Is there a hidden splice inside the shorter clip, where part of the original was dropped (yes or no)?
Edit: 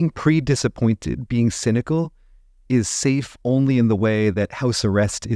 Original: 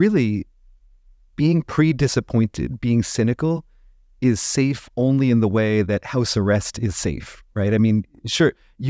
no